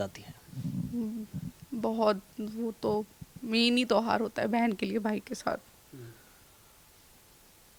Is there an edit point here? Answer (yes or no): no